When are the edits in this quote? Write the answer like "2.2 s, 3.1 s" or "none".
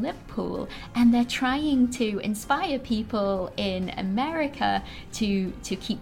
none